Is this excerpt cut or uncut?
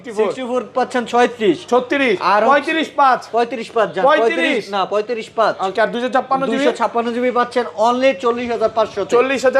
uncut